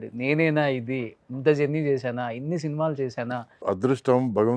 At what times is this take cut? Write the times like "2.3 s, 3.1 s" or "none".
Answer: 3.6 s